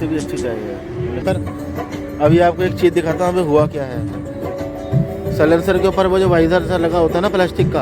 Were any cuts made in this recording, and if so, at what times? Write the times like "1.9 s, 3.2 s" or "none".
1.2 s